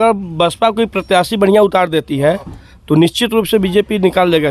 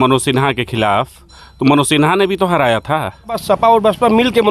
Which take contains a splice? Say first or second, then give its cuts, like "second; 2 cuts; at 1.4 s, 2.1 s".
second; 1 cut; at 3.4 s